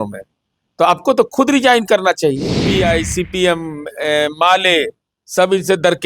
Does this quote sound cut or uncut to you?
cut